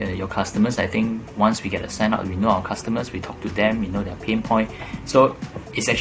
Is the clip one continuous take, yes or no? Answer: yes